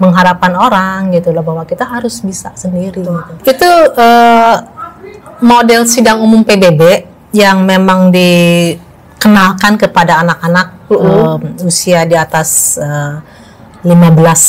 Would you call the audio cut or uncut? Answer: cut